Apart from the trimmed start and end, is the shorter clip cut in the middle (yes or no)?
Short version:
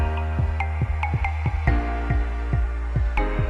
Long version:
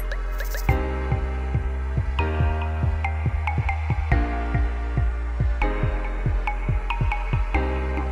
no